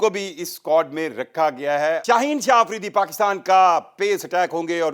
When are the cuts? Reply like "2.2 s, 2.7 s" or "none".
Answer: 2.0 s